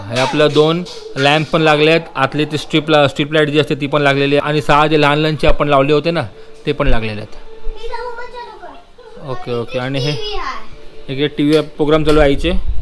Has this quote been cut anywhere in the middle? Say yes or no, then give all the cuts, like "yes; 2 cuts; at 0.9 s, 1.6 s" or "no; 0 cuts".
no; 0 cuts